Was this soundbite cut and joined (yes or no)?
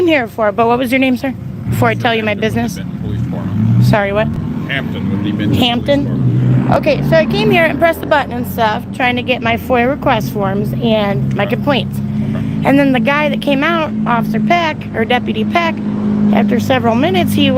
no